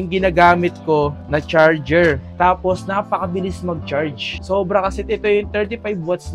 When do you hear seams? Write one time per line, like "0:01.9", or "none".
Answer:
none